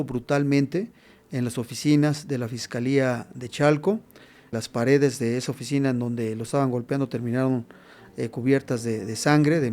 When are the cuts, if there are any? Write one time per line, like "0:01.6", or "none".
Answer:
0:04.5